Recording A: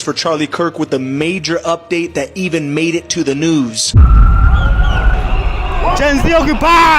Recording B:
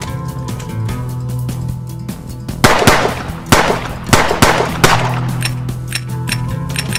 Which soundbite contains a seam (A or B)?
A